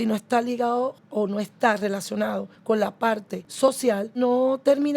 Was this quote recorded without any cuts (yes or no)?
no